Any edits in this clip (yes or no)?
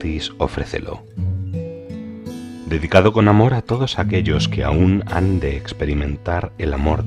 yes